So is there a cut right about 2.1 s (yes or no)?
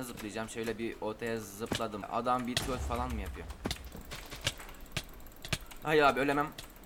yes